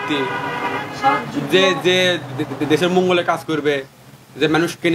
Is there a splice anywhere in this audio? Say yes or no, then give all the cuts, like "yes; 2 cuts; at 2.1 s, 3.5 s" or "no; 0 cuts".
no; 0 cuts